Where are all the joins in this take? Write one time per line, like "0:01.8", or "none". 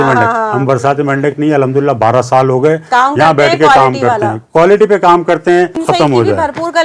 0:05.8

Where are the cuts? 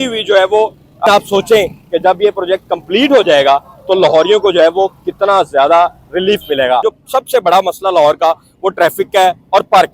0:01.1
0:06.9

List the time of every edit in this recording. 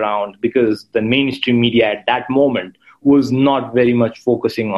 none

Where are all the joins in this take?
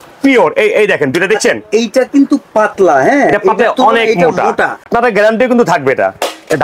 0:04.9

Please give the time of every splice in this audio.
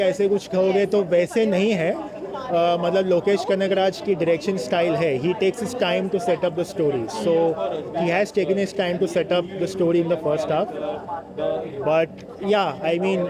none

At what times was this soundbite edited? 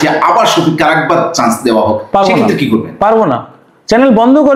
none

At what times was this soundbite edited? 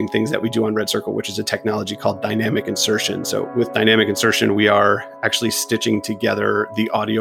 none

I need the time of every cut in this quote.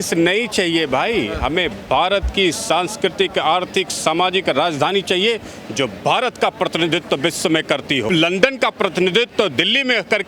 0:08.1

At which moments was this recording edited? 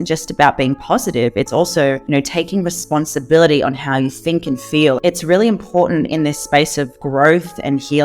0:02.0
0:05.0

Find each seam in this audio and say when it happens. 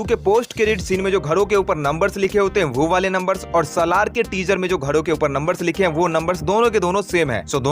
none

